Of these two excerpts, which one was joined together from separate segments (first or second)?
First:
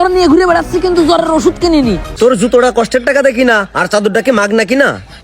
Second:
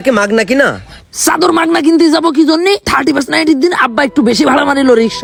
first